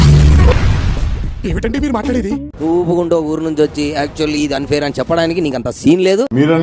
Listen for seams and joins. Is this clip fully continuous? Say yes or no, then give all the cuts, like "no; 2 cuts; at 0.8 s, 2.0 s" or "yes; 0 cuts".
yes; 0 cuts